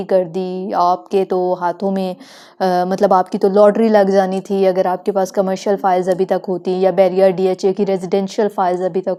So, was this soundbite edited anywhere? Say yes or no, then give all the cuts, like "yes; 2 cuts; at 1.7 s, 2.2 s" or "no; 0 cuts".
no; 0 cuts